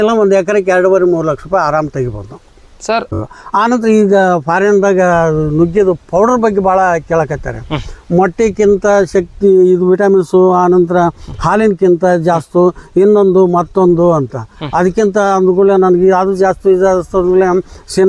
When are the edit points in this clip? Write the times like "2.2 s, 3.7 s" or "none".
3.1 s

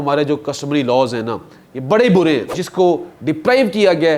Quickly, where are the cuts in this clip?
2.6 s

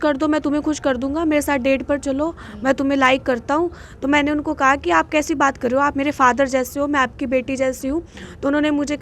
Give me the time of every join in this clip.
none

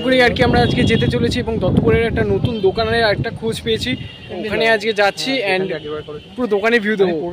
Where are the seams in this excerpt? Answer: 4.4 s

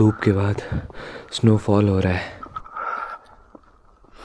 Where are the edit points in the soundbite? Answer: 2.4 s

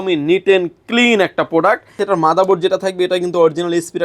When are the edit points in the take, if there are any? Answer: 2.0 s

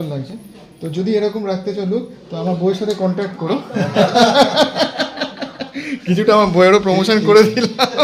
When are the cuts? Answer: none

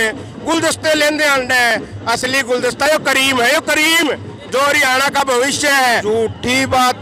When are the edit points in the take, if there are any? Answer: 6.0 s

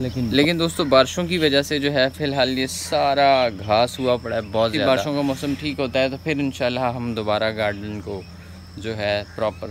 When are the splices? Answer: none

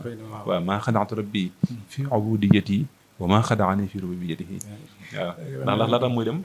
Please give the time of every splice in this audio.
4.9 s

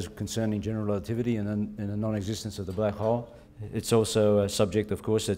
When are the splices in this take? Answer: 2.7 s

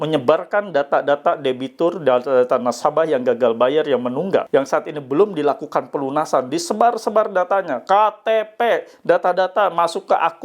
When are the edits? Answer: 4.5 s

